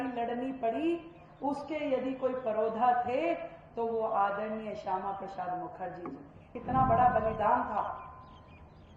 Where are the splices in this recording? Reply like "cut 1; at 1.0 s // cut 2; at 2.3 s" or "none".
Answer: cut 1; at 6.6 s